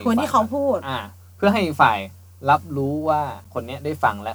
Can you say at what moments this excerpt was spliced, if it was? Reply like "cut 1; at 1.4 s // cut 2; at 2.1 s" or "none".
cut 1; at 3.4 s